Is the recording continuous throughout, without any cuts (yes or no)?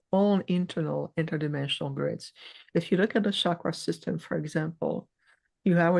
yes